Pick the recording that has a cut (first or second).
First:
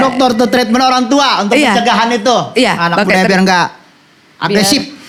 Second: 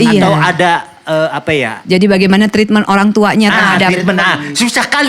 second